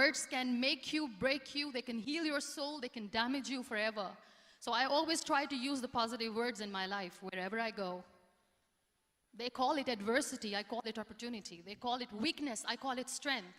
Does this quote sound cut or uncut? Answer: uncut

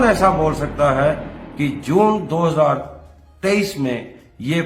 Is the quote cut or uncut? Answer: uncut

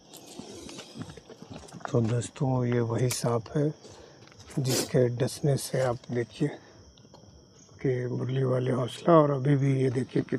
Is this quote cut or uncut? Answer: uncut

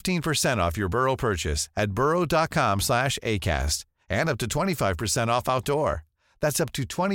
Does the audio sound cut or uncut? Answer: uncut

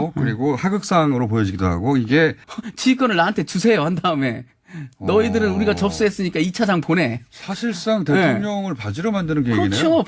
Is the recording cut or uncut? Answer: cut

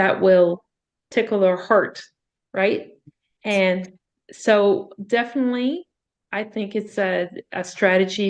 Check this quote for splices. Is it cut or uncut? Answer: uncut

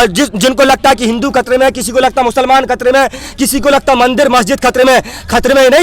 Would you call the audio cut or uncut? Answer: uncut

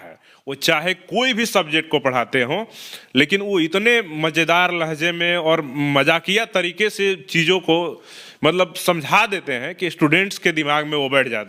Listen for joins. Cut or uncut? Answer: uncut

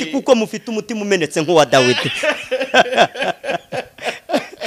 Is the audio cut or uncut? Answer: uncut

